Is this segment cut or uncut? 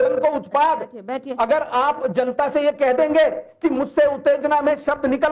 uncut